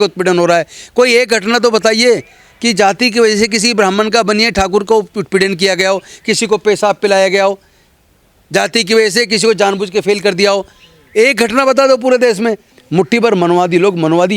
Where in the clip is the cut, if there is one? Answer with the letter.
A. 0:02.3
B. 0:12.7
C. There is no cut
B